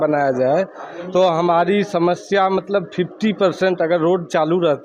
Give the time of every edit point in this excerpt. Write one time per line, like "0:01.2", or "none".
none